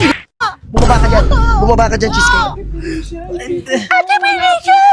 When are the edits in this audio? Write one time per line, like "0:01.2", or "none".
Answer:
none